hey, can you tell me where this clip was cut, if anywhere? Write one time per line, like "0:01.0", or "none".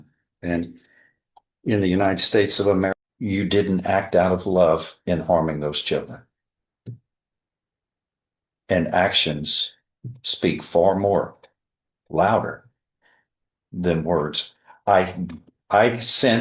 0:02.9